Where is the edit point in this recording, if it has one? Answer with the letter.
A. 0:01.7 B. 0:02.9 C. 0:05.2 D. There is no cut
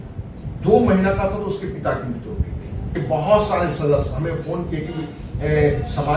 B